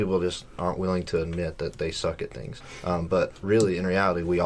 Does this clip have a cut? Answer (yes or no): no